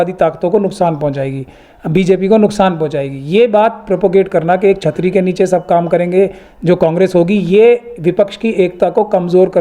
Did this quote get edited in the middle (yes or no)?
no